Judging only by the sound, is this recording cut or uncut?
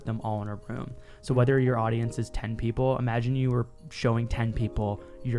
uncut